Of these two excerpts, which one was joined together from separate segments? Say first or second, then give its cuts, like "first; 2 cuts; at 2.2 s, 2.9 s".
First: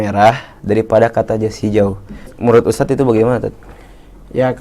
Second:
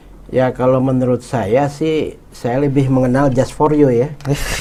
first; 1 cut; at 2.3 s